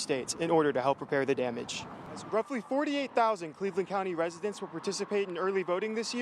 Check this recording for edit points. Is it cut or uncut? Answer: cut